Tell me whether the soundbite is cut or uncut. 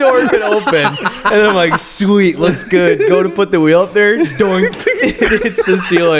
uncut